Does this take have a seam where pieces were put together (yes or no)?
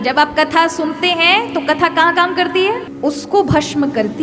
yes